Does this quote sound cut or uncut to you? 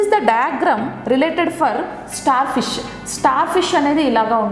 uncut